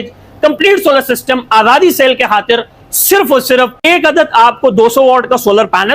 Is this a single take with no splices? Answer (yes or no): no